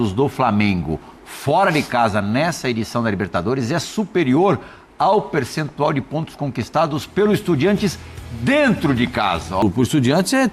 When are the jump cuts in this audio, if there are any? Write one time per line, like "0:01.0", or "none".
0:09.6

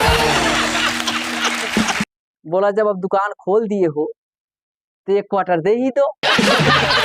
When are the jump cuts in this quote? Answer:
0:02.1

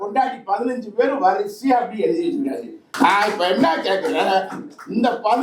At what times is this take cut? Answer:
0:02.9

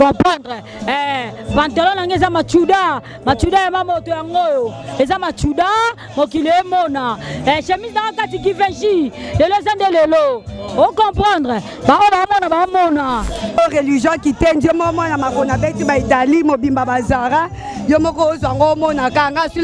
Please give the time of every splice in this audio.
0:13.6

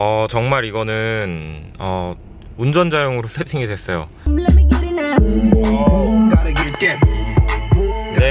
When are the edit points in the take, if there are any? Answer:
0:04.2

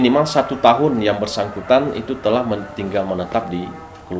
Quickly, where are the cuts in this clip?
none

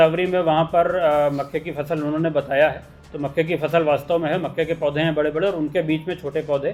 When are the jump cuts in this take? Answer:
none

